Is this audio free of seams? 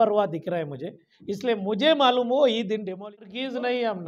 no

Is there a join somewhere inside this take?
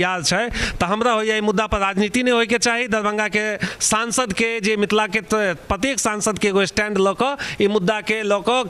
no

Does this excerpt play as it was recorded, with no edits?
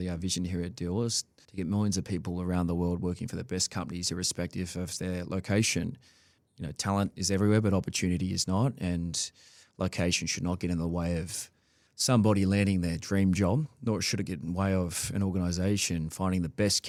yes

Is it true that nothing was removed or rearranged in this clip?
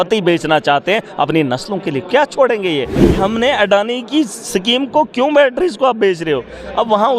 no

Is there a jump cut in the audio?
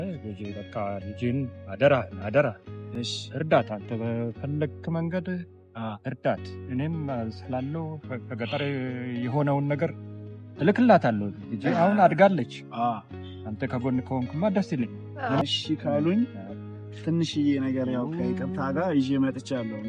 yes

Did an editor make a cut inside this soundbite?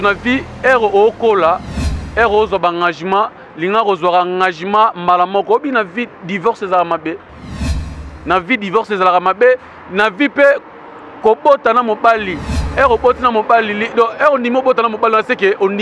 no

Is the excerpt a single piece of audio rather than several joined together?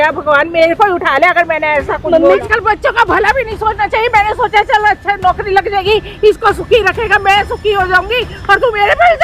no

